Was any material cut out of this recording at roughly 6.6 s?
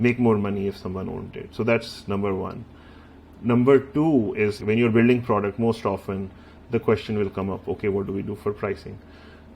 no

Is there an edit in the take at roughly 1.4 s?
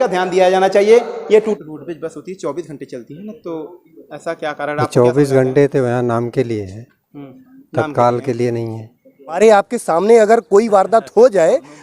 yes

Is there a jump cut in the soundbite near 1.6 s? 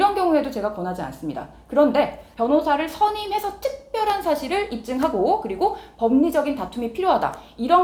no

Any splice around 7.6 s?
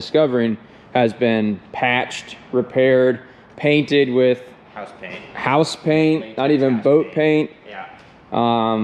no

